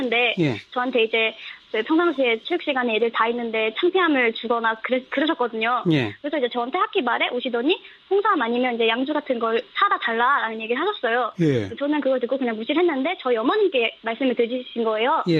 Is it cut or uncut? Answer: cut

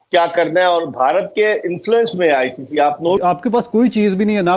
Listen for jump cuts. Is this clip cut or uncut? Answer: cut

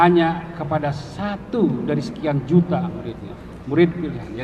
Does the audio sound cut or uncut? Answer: uncut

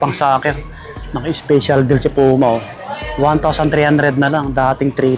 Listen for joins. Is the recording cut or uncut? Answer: uncut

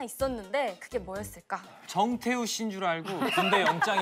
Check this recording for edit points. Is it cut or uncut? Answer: uncut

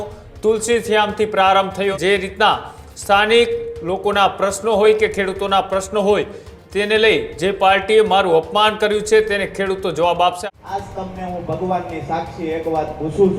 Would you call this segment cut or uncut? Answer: cut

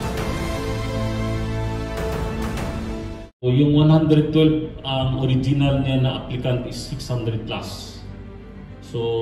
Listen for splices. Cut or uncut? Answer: cut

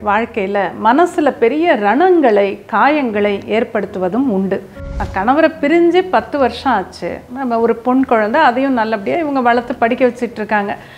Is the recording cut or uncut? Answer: cut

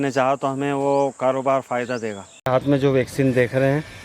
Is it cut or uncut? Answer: cut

